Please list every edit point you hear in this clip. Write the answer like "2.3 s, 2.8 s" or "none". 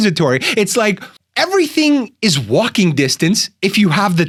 none